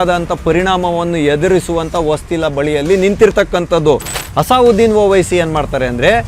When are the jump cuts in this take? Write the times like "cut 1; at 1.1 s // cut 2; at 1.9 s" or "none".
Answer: cut 1; at 4.2 s